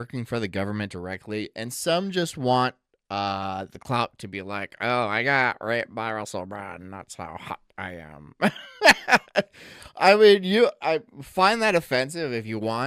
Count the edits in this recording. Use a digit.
0